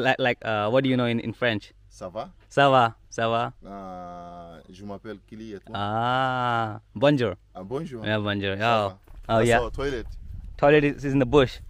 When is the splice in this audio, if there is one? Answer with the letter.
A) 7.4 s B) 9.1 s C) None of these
B